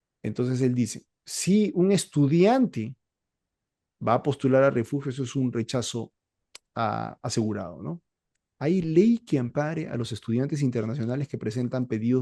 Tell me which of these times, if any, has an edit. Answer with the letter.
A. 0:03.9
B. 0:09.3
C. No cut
C